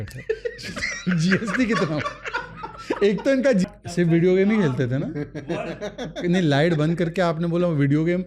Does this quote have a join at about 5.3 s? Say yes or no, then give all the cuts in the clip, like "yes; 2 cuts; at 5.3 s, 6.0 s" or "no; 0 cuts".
no; 1 cut; at 3.6 s